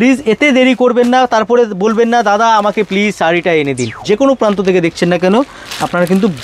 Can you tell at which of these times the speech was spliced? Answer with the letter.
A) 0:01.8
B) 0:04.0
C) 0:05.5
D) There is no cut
B